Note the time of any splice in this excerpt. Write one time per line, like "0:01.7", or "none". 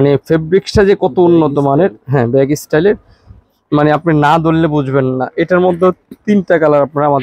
none

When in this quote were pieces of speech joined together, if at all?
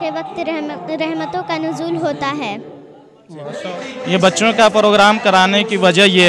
0:03.8

